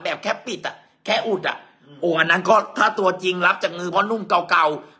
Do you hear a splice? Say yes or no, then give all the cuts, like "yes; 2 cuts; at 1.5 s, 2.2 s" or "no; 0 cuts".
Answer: no; 0 cuts